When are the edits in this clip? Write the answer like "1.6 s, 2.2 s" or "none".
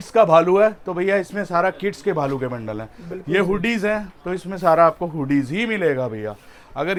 none